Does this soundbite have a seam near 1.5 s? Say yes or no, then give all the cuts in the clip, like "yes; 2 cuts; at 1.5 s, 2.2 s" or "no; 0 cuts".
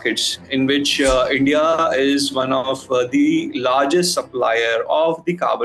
no; 0 cuts